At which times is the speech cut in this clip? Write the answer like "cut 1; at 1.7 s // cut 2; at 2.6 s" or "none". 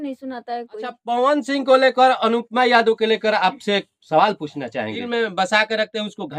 cut 1; at 1.0 s // cut 2; at 5.0 s